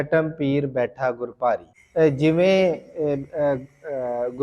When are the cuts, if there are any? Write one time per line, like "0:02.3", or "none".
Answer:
0:01.8